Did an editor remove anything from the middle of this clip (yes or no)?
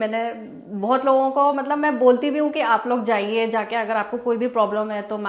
no